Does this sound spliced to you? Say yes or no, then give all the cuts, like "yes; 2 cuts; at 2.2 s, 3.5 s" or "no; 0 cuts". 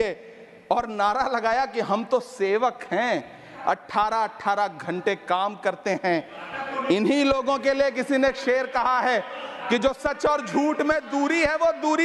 no; 0 cuts